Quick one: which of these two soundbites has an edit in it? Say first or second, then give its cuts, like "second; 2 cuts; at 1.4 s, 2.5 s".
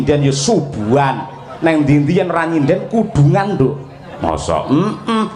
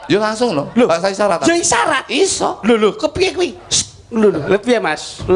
second; 1 cut; at 4.4 s